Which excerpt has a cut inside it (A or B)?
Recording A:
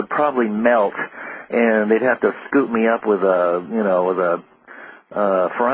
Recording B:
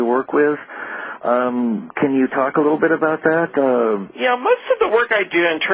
A